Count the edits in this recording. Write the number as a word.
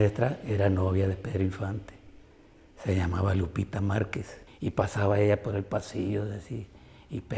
one